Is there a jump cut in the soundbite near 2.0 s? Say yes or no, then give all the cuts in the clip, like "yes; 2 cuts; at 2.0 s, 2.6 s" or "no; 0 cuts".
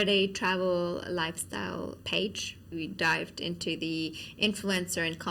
yes; 2 cuts; at 2.0 s, 2.7 s